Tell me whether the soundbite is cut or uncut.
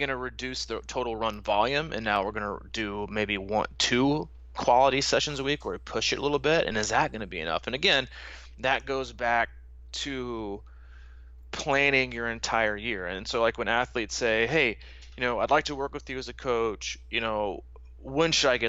uncut